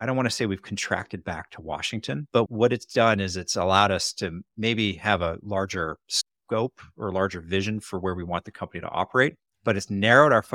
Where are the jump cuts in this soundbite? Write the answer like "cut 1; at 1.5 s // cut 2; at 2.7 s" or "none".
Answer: cut 1; at 2.4 s // cut 2; at 9.5 s

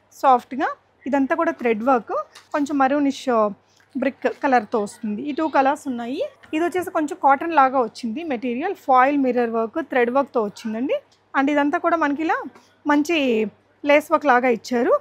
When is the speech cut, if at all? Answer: cut 1; at 2.4 s // cut 2; at 6.4 s // cut 3; at 11.2 s

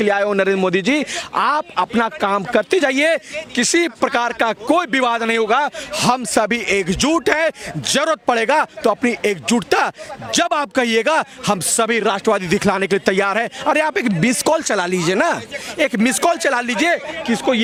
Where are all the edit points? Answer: none

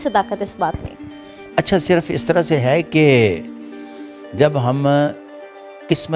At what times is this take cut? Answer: none

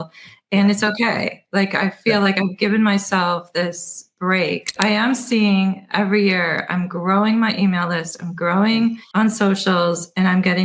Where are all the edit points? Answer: cut 1; at 4.8 s // cut 2; at 9.0 s

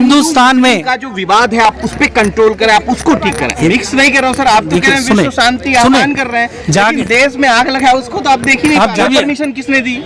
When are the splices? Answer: cut 1; at 3.6 s // cut 2; at 9.0 s

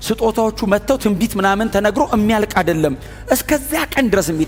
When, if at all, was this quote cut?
none

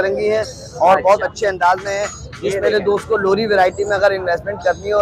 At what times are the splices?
none

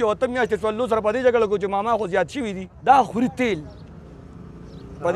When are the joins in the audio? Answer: cut 1; at 2.7 s

